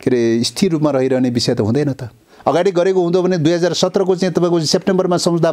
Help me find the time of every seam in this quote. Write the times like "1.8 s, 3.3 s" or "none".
2.2 s